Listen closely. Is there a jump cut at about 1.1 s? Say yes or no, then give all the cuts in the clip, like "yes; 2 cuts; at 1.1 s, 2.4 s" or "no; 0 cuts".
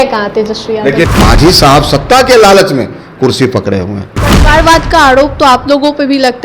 yes; 1 cut; at 1.1 s